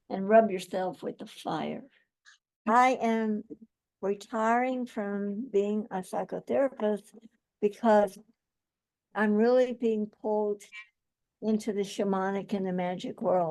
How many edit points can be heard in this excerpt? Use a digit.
2